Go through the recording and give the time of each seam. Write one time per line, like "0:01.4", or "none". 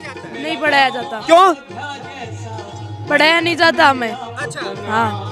none